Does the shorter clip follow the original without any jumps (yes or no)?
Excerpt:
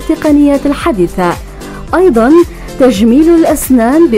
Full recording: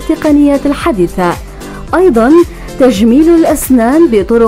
yes